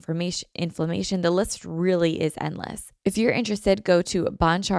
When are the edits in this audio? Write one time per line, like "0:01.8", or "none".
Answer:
0:02.8